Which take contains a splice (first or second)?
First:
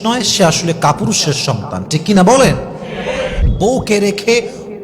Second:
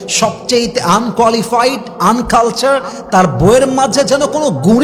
first